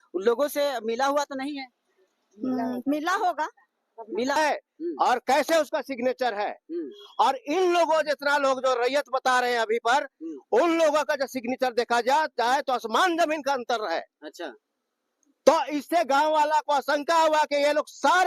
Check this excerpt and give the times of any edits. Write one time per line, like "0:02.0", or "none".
0:04.4

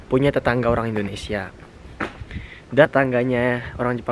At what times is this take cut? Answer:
0:02.9

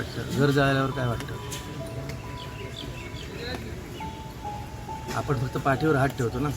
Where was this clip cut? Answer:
none

